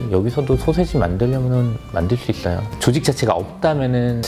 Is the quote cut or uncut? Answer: cut